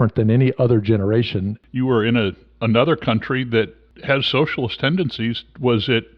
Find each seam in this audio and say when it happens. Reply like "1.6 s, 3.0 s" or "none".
1.6 s, 3.9 s